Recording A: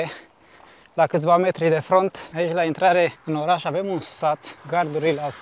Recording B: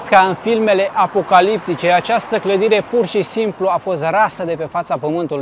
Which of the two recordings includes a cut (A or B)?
A